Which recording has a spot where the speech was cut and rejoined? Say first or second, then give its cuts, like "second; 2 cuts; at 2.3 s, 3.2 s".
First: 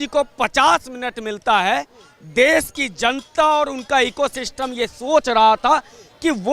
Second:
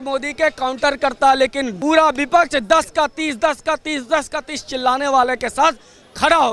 second; 1 cut; at 1.7 s